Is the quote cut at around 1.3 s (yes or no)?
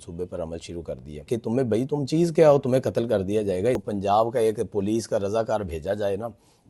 yes